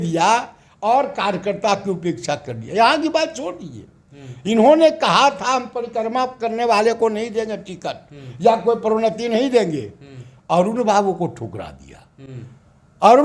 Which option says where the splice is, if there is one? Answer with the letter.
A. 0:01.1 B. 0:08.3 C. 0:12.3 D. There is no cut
D